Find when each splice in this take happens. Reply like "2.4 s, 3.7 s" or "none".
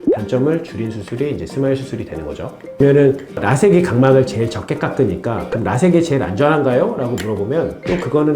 2.6 s